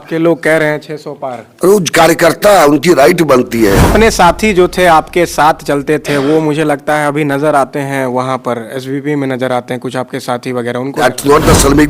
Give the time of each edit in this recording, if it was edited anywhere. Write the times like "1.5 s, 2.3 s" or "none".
3.9 s, 11.0 s